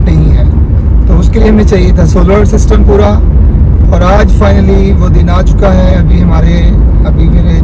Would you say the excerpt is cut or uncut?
uncut